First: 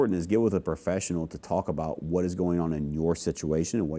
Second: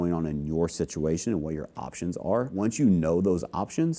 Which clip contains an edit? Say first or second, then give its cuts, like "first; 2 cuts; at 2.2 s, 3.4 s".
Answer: second; 1 cut; at 2.5 s